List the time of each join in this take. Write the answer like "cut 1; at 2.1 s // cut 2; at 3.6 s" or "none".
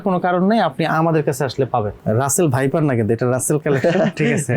cut 1; at 2.0 s